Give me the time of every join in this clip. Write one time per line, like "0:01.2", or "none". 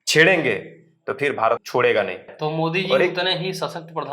0:01.6
0:02.3